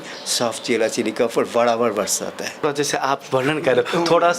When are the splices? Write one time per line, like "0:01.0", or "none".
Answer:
0:02.6